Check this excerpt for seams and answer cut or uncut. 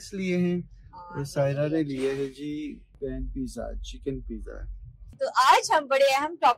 cut